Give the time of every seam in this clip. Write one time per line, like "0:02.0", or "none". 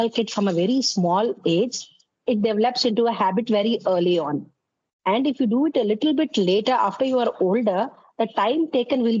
none